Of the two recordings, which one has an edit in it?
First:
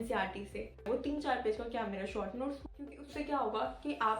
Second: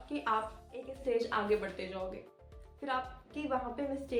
first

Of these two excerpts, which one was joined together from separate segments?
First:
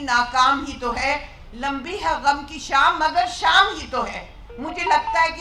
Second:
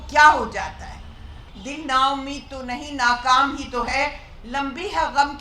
second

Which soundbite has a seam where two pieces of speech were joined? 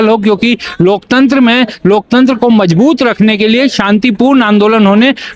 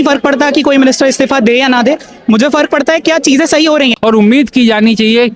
second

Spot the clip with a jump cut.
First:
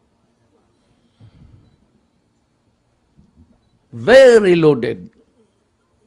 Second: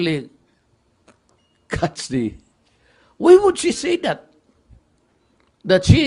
first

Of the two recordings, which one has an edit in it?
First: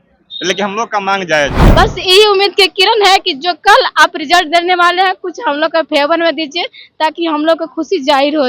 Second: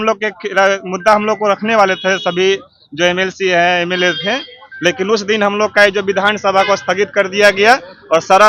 first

